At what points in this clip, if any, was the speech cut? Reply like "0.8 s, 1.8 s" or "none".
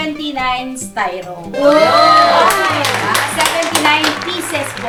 none

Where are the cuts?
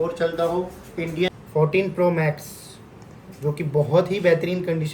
1.3 s

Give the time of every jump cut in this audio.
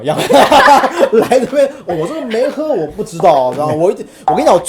none

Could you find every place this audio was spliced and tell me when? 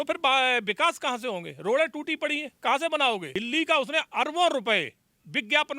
3.3 s

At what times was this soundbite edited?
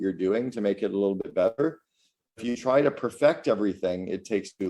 none

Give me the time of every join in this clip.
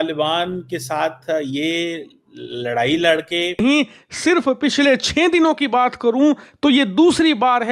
3.6 s

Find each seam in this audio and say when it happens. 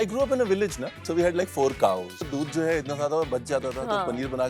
1.0 s, 2.3 s

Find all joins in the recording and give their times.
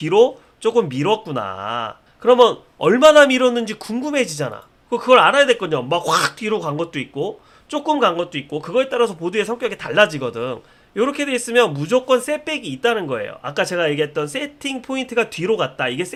none

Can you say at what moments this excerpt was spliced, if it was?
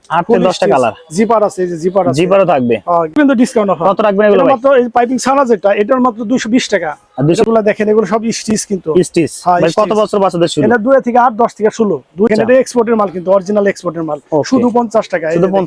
3.1 s, 7.4 s, 12.3 s

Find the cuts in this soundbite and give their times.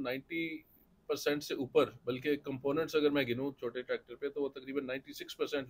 none

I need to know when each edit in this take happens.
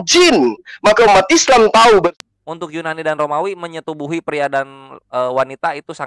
2.1 s

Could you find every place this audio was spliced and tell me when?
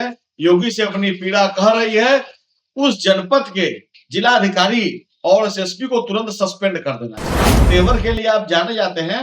7.6 s

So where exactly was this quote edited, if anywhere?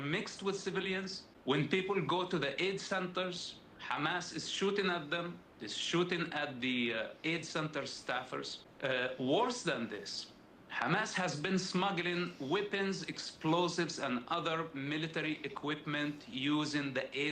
1.2 s, 8.6 s

